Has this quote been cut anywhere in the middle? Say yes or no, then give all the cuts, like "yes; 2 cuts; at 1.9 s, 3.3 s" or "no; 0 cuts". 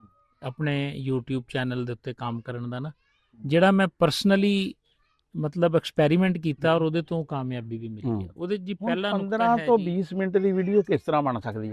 yes; 1 cut; at 9.1 s